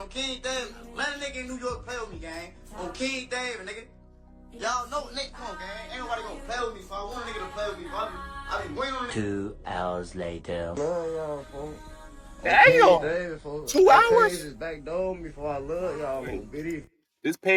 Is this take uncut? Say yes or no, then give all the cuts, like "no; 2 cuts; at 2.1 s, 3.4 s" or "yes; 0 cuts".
yes; 0 cuts